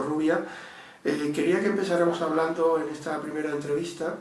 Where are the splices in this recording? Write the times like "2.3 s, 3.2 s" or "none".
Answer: 1.9 s